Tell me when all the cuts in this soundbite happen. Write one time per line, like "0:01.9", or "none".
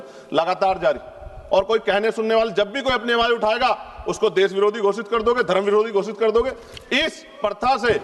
none